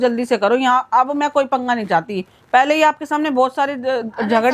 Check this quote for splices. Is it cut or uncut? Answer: uncut